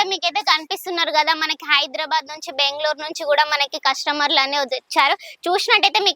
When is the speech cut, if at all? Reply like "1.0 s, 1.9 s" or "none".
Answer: none